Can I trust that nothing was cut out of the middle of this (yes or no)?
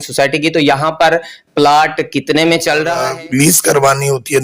no